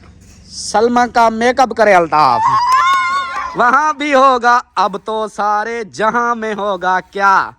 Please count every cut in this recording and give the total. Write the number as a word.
one